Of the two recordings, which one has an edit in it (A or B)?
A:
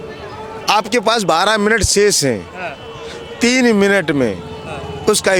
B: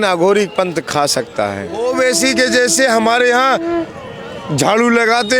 B